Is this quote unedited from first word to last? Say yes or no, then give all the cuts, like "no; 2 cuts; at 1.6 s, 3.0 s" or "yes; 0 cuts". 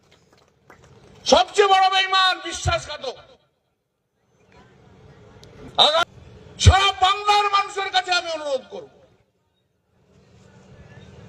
no; 1 cut; at 6.0 s